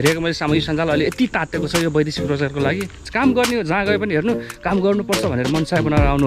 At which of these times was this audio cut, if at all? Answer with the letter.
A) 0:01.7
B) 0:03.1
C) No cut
B